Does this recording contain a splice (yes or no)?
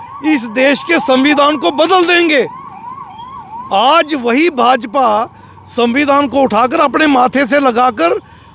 no